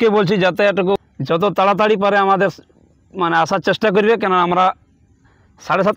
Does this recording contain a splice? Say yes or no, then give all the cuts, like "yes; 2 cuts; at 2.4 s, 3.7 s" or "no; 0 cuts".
yes; 1 cut; at 1.0 s